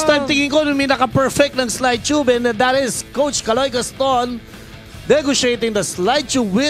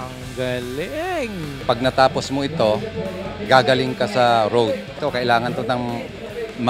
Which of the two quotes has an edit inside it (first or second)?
second